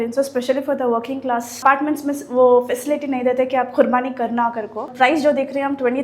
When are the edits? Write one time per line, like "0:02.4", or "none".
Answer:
0:01.6
0:04.9